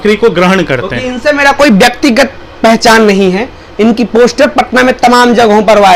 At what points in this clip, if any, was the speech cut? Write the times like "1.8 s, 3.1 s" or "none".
none

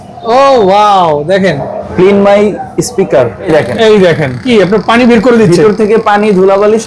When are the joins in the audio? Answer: 1.8 s, 3.5 s, 4.4 s

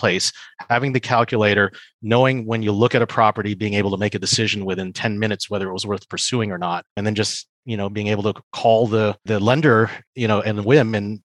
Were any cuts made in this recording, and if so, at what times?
7.2 s, 9.2 s

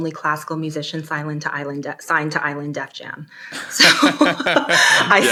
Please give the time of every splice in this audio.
none

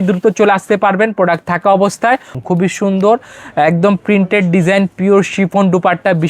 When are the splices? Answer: 2.4 s

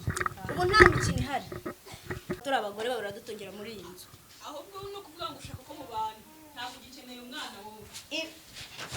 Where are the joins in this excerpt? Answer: 2.4 s

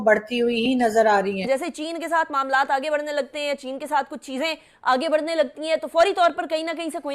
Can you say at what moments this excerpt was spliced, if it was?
1.4 s

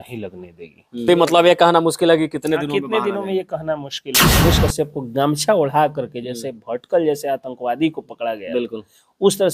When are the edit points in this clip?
1.1 s, 4.4 s

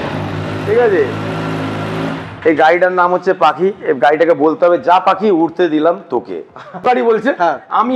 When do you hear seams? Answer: 6.9 s

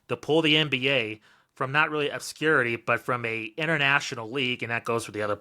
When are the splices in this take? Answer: none

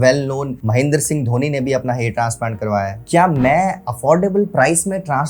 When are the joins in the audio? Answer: 3.0 s

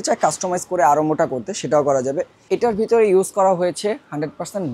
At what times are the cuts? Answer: 2.4 s

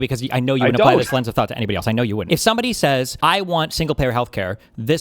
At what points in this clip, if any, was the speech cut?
2.2 s, 3.1 s

